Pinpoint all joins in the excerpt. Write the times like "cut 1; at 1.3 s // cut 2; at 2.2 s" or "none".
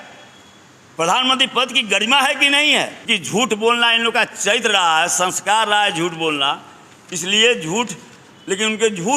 cut 1; at 3.0 s